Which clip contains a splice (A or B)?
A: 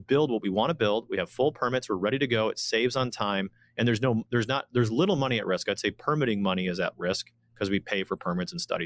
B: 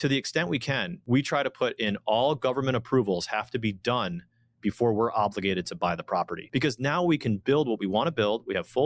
B